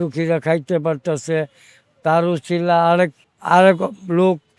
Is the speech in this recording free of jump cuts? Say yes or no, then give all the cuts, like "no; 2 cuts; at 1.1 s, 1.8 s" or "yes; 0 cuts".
yes; 0 cuts